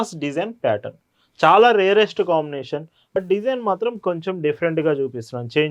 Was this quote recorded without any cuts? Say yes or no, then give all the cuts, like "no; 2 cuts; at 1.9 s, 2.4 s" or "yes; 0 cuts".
no; 1 cut; at 3.2 s